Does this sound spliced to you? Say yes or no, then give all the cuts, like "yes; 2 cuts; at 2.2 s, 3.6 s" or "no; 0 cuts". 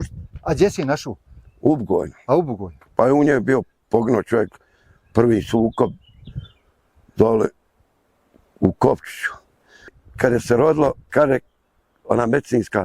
yes; 1 cut; at 9.9 s